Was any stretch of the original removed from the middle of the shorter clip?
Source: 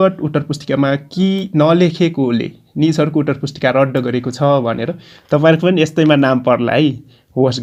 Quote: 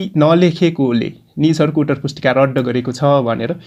no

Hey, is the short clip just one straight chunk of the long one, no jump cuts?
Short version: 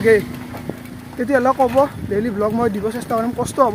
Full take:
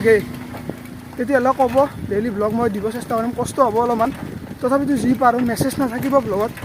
yes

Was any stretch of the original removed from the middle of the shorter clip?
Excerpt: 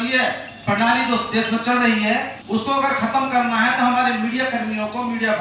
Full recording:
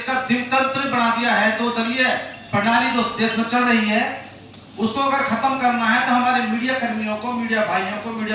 yes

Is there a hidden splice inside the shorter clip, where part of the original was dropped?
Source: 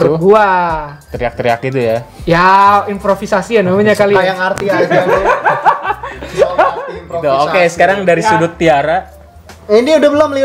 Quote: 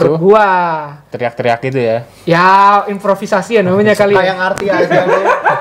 no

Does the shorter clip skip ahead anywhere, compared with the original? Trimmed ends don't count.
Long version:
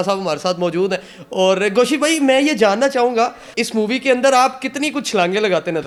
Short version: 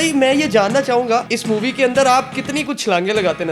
yes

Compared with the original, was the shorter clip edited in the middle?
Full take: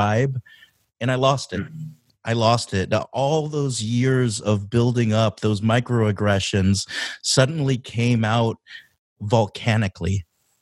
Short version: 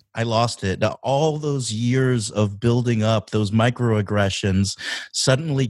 no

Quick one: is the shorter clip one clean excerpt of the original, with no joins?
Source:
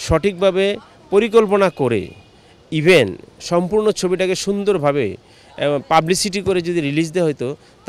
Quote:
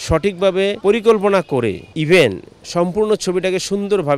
no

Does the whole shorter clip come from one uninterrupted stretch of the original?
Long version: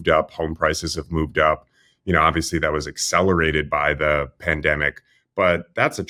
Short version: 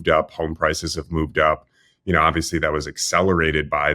yes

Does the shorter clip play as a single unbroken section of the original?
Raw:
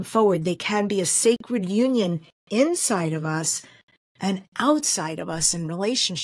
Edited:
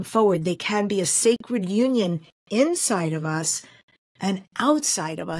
yes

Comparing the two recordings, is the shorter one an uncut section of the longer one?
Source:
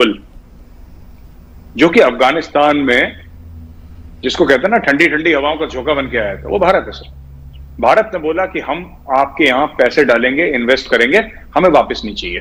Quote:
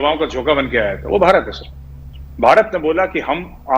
yes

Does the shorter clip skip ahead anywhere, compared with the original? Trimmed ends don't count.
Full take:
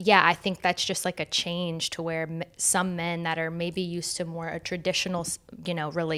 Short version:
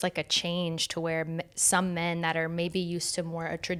no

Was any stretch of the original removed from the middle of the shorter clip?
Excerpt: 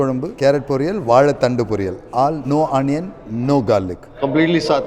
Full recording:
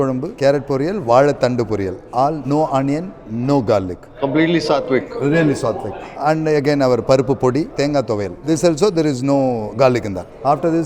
no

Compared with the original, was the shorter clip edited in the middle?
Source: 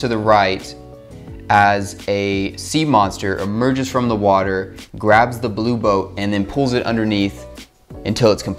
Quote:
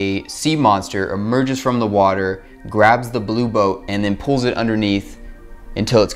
no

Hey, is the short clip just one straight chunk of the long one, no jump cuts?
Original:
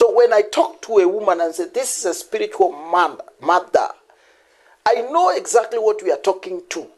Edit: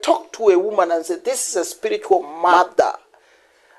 no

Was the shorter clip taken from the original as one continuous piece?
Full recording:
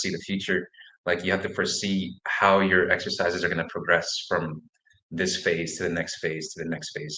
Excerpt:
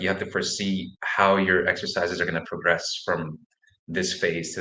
yes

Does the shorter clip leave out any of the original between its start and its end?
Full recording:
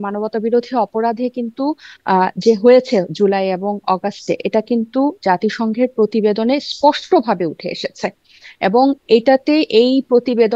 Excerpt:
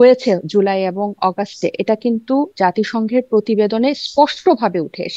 no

